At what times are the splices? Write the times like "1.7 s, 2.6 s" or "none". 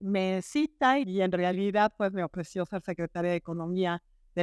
1.0 s